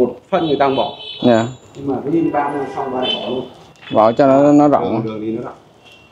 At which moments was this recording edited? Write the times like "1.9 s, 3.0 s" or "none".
none